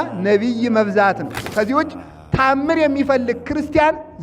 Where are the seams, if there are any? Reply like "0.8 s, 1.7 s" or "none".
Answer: 1.5 s